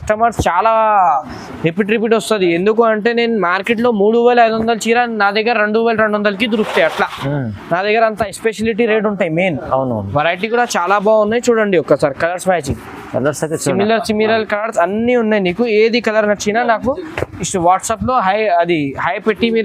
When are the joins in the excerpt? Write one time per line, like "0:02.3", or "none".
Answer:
none